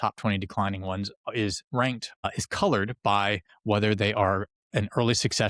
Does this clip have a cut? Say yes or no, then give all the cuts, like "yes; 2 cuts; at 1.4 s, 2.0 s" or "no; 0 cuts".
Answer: yes; 2 cuts; at 2.1 s, 3.5 s